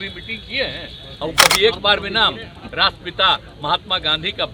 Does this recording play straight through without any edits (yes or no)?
no